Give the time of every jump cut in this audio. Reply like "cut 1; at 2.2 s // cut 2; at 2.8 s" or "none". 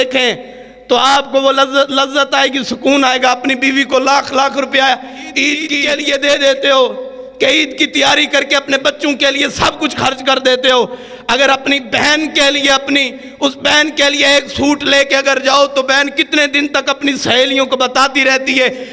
cut 1; at 5.8 s